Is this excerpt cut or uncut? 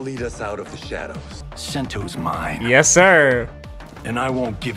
cut